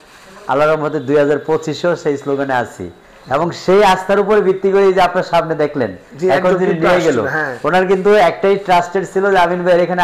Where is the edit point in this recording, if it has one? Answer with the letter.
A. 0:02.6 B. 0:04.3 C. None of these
C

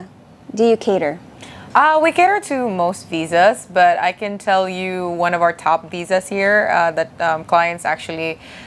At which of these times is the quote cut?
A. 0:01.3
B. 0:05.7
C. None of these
C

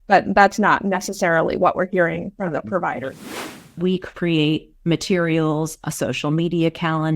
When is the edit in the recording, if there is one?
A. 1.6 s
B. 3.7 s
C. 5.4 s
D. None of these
B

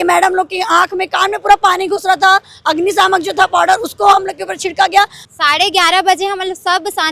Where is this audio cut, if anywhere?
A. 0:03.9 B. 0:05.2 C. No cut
B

